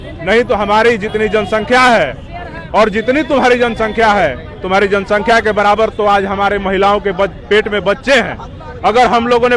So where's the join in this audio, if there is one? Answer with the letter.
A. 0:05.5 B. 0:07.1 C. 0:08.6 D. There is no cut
D